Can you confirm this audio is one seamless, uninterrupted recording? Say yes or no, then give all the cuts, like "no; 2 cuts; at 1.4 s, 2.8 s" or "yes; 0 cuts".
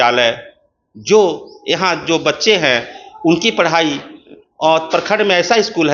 yes; 0 cuts